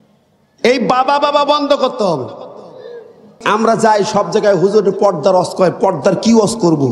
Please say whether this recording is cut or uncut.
cut